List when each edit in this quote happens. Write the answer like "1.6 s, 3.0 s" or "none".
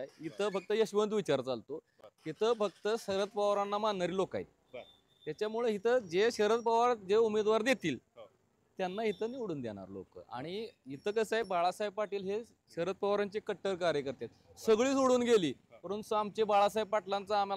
none